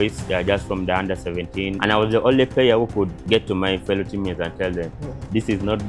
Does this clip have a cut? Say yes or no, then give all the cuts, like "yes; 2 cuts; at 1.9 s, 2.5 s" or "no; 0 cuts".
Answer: yes; 2 cuts; at 1.7 s, 3.2 s